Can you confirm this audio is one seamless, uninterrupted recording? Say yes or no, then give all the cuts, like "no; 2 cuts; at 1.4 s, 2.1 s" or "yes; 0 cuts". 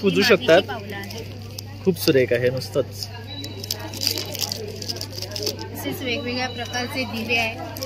yes; 0 cuts